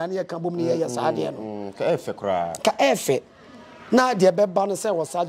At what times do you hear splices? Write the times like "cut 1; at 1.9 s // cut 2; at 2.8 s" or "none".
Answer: none